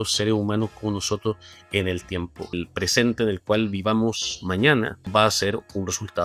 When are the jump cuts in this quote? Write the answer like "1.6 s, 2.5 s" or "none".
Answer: 2.5 s, 5.0 s